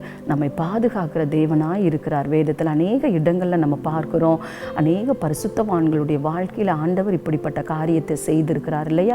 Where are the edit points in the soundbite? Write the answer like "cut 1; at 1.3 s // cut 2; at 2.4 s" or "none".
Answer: none